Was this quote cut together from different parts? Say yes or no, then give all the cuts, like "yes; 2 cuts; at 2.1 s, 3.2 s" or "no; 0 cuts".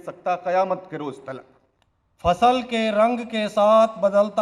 yes; 1 cut; at 1.5 s